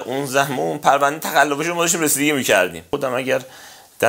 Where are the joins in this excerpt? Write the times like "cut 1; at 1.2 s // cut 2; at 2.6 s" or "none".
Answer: cut 1; at 2.8 s